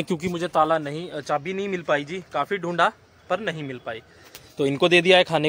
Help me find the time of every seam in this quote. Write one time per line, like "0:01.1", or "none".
none